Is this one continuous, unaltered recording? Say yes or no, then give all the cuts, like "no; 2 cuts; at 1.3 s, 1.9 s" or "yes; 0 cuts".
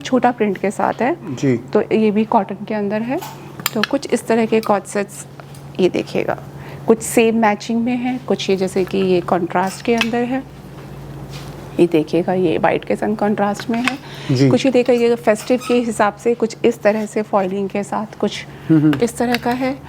yes; 0 cuts